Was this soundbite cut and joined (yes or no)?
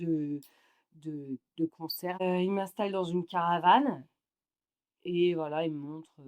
yes